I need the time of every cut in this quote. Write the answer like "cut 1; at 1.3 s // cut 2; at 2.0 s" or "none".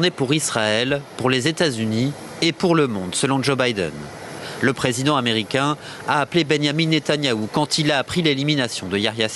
none

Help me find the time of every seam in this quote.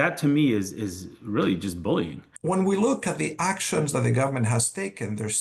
cut 1; at 2.2 s

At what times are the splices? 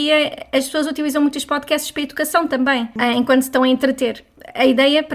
cut 1; at 2.9 s // cut 2; at 4.3 s

